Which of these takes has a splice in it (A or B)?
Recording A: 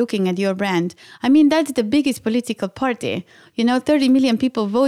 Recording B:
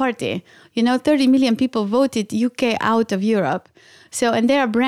B